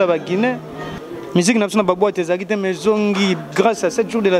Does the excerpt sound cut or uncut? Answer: cut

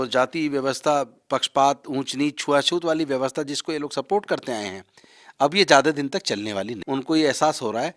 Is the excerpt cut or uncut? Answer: cut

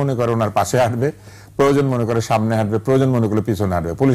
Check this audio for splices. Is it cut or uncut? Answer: uncut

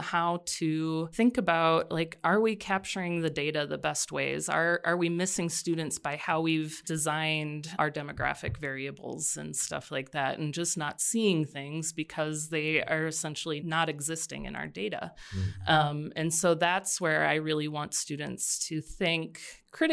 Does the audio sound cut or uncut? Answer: cut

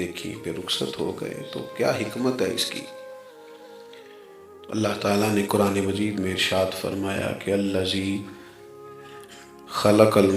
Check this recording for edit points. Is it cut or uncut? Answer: cut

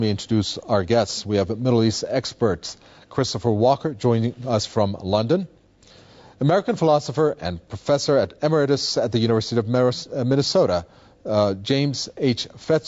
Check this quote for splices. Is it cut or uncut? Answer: cut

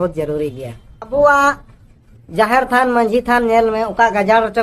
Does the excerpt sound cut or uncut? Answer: cut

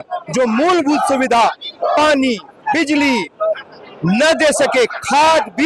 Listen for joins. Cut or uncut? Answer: uncut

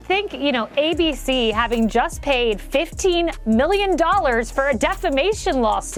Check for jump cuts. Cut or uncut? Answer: uncut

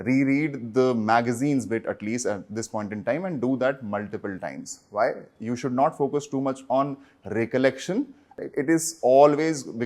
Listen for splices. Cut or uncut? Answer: cut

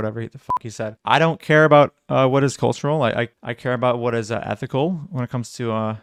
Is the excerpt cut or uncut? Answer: uncut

